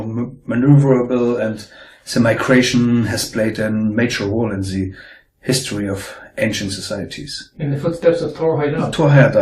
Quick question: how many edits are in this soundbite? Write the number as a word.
one